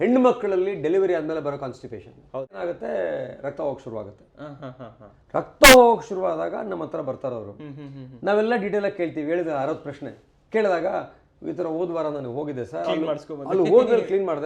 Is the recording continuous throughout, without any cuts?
no; 1 cut; at 2.6 s

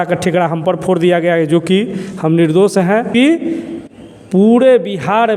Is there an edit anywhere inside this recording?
yes; 1 cut; at 3.1 s

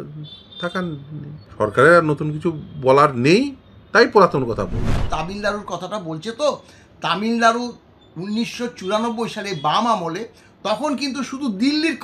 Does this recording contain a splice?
yes; 2 cuts; at 1.4 s, 5.0 s

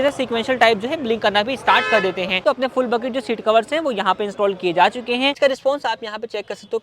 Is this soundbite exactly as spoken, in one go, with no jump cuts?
no; 2 cuts; at 2.4 s, 5.4 s

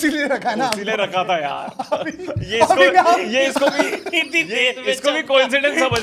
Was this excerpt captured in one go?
yes; 0 cuts

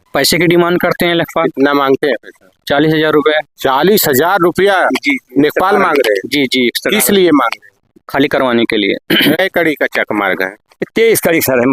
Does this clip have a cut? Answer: yes; 1 cut; at 9.4 s

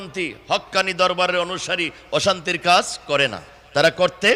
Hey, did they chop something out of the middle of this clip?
no; 0 cuts

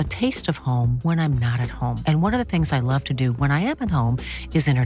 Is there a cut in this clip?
no; 0 cuts

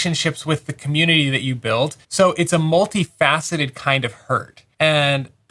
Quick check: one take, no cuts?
no; 2 cuts; at 2.0 s, 4.6 s

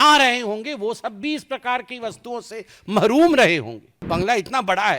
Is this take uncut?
no; 1 cut; at 3.9 s

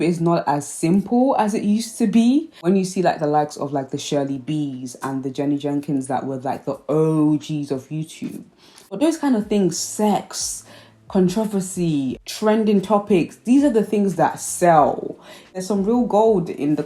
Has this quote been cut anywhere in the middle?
yes; 2 cuts; at 8.8 s, 15.5 s

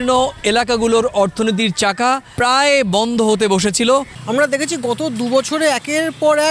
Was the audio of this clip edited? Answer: yes; 1 cut; at 4.2 s

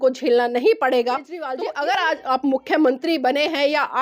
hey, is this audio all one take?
no; 1 cut; at 1.3 s

